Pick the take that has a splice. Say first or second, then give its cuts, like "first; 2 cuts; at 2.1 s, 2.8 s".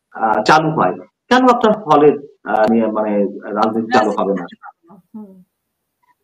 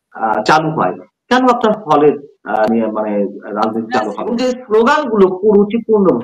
second; 1 cut; at 4.2 s